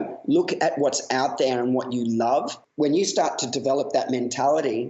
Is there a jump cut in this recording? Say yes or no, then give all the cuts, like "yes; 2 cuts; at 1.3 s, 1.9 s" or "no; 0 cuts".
yes; 1 cut; at 2.6 s